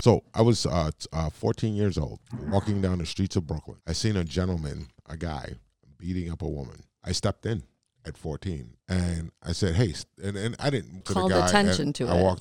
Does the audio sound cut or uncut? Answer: cut